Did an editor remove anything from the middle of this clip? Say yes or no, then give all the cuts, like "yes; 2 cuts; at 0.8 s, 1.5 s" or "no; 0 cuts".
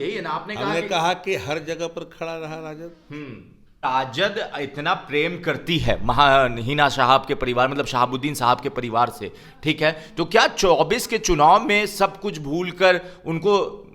yes; 1 cut; at 3.8 s